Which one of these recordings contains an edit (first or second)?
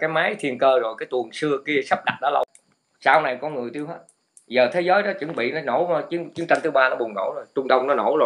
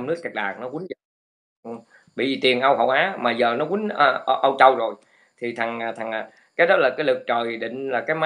first